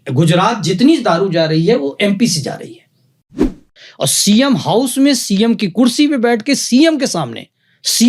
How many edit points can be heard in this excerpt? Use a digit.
1